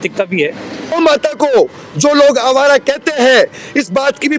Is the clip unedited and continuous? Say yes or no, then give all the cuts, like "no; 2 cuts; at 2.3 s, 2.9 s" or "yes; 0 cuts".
no; 1 cut; at 0.9 s